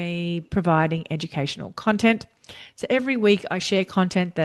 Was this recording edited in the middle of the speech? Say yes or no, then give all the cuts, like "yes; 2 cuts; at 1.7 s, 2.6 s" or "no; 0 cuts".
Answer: no; 0 cuts